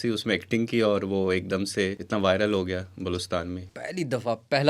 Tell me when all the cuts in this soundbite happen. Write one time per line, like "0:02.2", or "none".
0:02.0
0:03.7